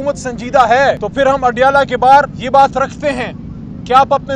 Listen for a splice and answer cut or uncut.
cut